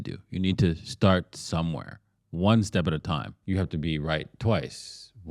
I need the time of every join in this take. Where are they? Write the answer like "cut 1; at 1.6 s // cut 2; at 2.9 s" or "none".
cut 1; at 3.3 s